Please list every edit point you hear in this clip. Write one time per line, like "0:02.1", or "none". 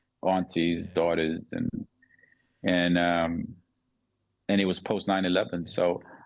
none